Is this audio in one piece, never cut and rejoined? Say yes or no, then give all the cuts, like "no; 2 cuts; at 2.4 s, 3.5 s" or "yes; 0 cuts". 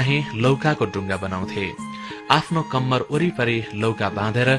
yes; 0 cuts